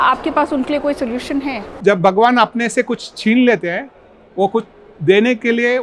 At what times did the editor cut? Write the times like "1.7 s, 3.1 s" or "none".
1.7 s